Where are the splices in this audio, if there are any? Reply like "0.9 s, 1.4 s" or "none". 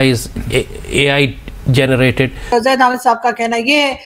2.4 s